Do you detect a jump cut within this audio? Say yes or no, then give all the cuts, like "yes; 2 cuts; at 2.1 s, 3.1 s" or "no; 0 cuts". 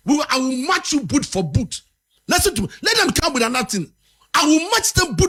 no; 0 cuts